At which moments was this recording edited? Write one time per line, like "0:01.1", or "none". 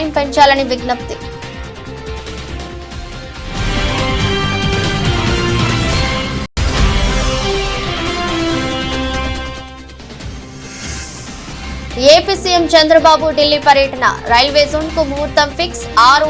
0:02.1
0:06.5